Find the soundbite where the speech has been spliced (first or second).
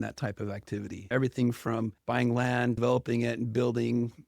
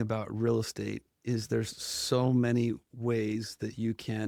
first